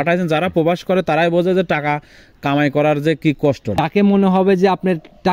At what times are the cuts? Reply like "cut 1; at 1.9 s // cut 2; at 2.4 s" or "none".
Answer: cut 1; at 3.7 s